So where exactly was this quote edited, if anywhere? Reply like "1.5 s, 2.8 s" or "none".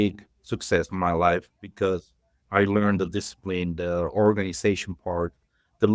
none